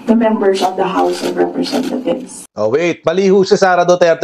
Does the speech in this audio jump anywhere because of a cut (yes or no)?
yes